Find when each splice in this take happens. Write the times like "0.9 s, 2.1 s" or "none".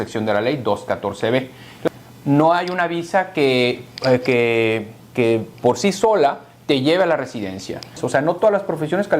1.7 s, 8.0 s